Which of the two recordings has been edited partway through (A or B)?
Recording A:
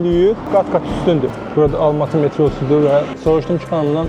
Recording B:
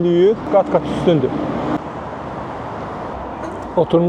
A